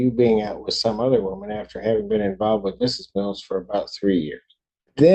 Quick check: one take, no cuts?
yes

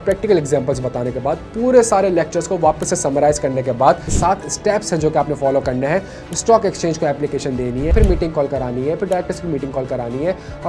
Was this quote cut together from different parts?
yes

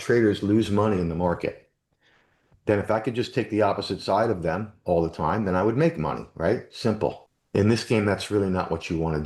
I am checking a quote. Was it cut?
yes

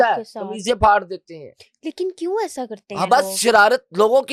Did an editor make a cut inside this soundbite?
no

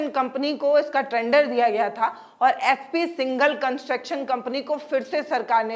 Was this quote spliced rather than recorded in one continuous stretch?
no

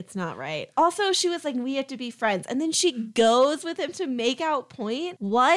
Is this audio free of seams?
yes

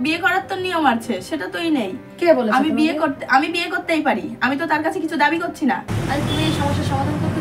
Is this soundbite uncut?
no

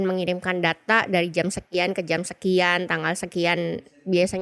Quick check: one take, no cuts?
yes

